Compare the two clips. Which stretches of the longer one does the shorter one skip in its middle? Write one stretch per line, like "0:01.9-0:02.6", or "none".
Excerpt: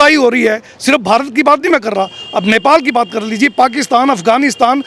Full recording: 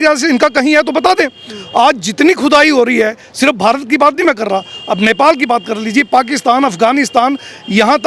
none